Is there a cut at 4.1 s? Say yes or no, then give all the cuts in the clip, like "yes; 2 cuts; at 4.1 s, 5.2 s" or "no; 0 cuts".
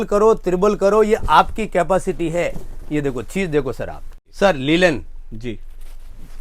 yes; 1 cut; at 4.1 s